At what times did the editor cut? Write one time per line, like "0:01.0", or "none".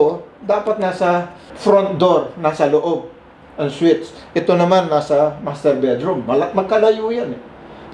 0:01.4